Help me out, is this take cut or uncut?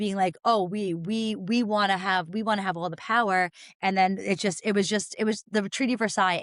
uncut